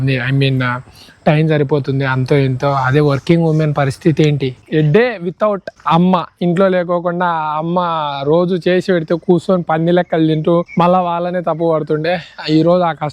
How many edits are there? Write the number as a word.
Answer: three